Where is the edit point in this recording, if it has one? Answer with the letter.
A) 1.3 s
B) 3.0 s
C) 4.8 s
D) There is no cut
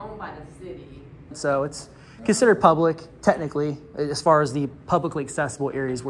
A